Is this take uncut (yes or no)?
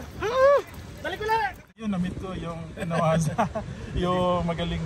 no